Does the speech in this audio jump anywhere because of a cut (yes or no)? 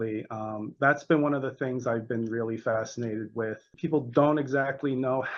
yes